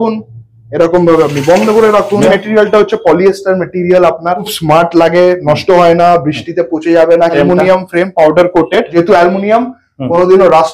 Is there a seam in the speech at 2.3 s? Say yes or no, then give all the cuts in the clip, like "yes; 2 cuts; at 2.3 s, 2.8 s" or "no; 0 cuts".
yes; 4 cuts; at 2.3 s, 4.5 s, 7.4 s, 8.9 s